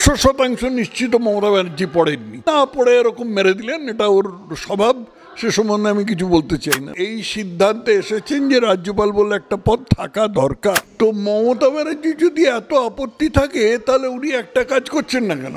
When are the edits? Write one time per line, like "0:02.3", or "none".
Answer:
0:02.3
0:07.0
0:10.9